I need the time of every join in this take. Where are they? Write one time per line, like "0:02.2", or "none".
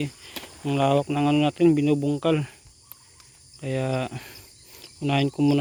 none

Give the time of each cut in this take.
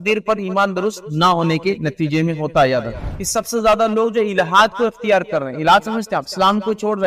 0:03.0

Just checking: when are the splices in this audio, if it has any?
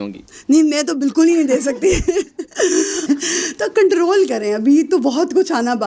0:03.1

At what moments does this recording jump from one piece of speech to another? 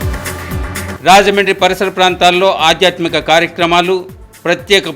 0:00.9

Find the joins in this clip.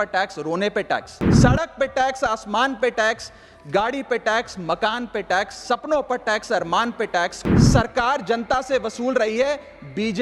0:01.2
0:07.4

